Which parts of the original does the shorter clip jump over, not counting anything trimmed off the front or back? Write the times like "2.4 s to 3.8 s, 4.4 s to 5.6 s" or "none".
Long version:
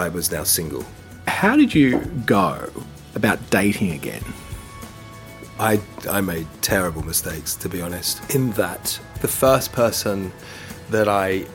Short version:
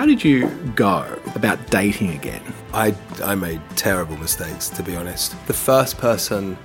2.7 s to 3.0 s, 4.3 s to 5.4 s, 8.1 s to 9.0 s